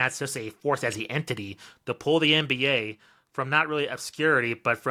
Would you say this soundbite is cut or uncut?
uncut